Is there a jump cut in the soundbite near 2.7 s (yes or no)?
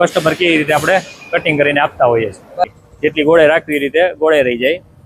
yes